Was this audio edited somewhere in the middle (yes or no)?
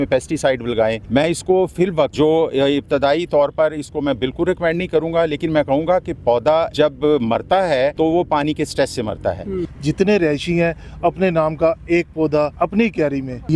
yes